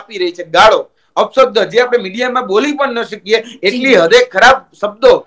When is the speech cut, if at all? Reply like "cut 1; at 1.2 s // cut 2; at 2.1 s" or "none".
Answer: none